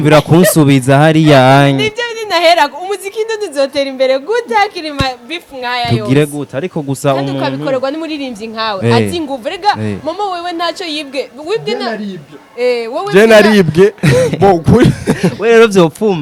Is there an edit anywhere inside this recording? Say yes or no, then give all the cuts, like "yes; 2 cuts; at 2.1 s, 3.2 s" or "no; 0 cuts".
no; 0 cuts